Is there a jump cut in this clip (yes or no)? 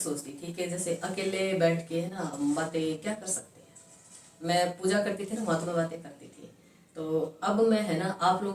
no